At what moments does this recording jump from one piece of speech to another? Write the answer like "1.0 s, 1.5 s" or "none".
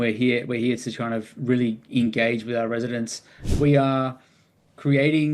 3.4 s

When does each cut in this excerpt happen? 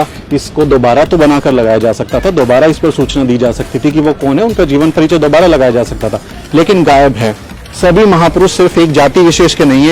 7.6 s

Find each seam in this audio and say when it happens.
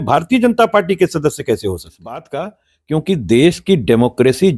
2.3 s

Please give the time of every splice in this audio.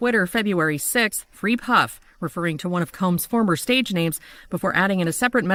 none

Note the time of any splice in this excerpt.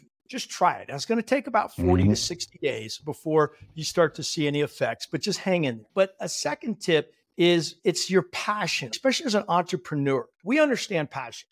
5.8 s, 8.9 s, 10.3 s

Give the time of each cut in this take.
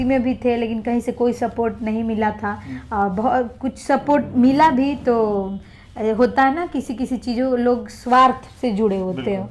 none

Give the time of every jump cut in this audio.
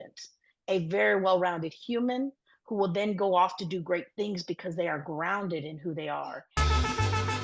6.5 s

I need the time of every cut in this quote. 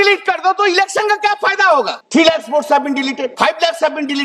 2.0 s, 3.3 s

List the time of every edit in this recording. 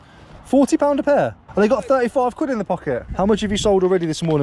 1.4 s, 3.1 s

